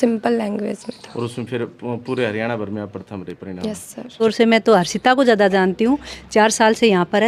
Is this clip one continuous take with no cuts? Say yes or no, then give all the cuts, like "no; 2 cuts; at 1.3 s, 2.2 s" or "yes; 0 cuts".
no; 1 cut; at 4.1 s